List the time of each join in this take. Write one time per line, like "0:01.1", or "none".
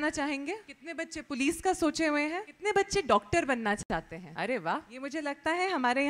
0:00.9
0:02.5
0:04.2
0:05.2

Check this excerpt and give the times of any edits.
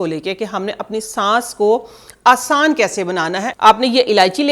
0:03.5

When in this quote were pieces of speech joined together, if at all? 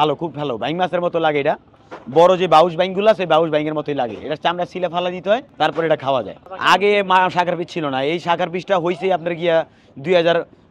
0:05.5
0:06.4

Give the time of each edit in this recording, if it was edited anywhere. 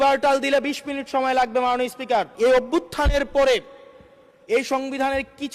0:02.3

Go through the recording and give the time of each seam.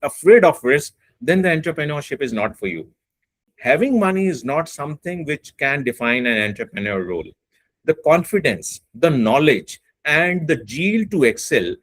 0:03.5

